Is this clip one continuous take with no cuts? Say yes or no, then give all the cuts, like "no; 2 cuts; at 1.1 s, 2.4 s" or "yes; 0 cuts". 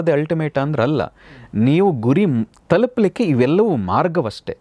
yes; 0 cuts